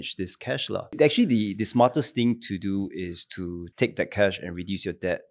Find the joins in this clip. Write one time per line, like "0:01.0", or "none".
0:00.9
0:03.6